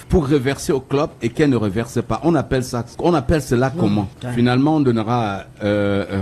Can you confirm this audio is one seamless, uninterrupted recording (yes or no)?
no